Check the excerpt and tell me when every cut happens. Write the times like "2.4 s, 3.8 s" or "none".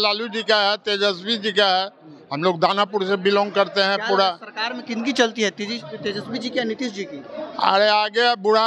none